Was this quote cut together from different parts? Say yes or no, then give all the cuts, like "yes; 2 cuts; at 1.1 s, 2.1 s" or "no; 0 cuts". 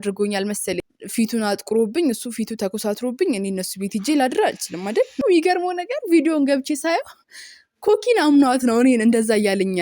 yes; 2 cuts; at 0.8 s, 5.2 s